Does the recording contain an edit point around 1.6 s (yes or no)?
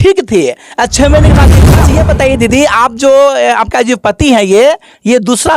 yes